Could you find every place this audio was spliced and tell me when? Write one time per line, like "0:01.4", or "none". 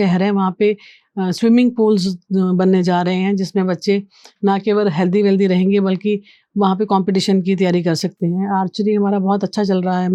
none